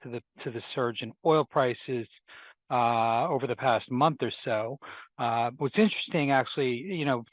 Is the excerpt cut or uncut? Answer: uncut